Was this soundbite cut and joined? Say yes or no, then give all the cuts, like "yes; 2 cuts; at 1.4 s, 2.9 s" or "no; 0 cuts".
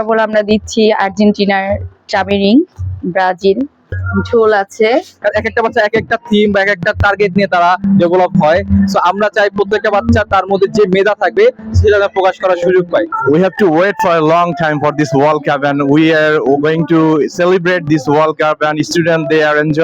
yes; 4 cuts; at 2.1 s, 3.8 s, 5.1 s, 13.1 s